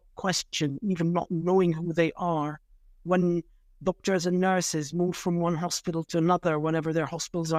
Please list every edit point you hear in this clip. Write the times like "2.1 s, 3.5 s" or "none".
none